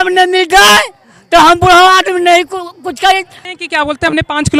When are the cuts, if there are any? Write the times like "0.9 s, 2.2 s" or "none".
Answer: 3.4 s